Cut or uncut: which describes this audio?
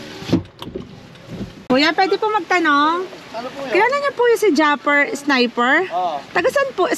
cut